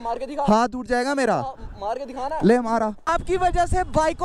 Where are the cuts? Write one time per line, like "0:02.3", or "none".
0:03.2